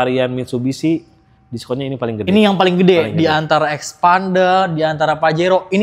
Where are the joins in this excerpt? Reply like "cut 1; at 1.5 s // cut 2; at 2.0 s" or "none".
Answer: none